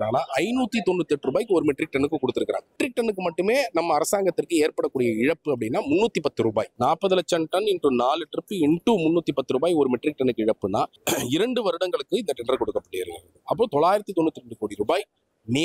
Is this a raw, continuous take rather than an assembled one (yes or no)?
no